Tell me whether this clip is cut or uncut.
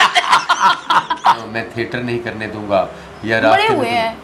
cut